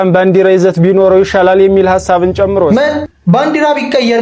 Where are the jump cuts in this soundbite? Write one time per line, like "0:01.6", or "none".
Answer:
0:03.0